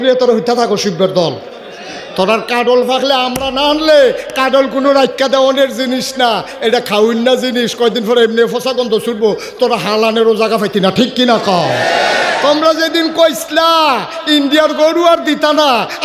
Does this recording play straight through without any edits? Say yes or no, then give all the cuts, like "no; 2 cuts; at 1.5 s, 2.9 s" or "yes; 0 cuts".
yes; 0 cuts